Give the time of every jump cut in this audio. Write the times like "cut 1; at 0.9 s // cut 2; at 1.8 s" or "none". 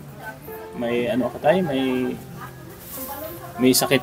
none